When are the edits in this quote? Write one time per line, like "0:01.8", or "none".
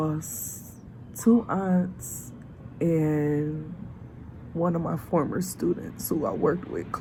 none